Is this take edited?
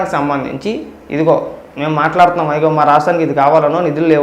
yes; 1 cut; at 0.9 s

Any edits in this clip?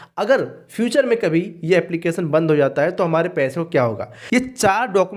yes; 1 cut; at 4.1 s

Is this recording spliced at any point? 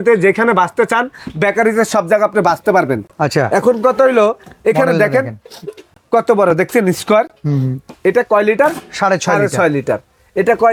no; 0 cuts

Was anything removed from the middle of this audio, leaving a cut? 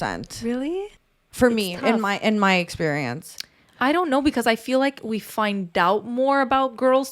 yes; 1 cut; at 0.9 s

